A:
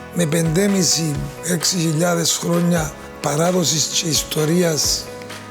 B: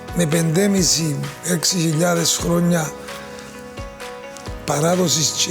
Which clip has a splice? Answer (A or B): A